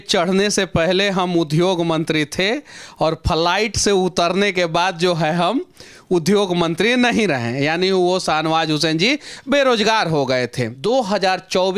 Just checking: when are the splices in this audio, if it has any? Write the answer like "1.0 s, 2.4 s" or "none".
10.7 s